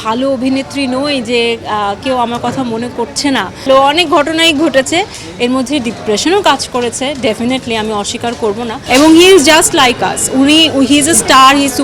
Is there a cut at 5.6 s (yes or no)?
no